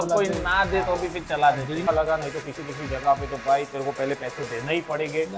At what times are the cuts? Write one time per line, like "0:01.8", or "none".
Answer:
0:01.9